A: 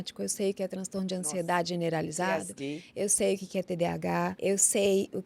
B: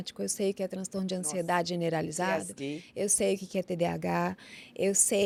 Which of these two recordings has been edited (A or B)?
A